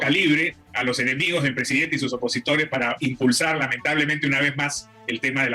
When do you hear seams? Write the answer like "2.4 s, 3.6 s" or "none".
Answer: none